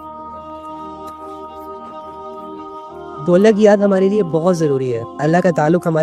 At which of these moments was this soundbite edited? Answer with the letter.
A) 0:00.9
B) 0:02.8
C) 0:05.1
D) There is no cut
D